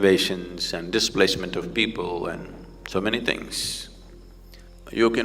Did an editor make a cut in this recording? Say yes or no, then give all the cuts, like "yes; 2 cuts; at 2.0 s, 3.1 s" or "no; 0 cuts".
no; 0 cuts